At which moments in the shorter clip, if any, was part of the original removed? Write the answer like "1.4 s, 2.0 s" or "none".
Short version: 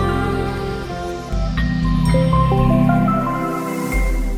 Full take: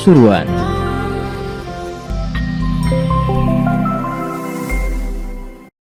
none